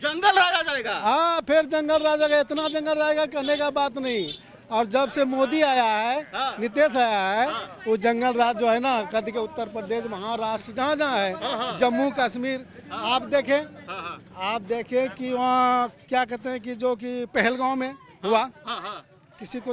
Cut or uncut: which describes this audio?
uncut